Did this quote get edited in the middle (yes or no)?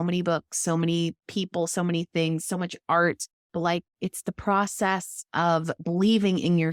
no